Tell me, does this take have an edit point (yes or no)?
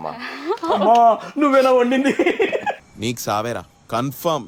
no